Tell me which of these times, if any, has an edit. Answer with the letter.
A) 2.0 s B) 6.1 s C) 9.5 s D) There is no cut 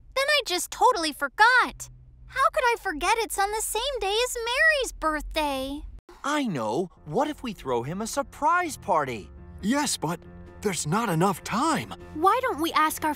B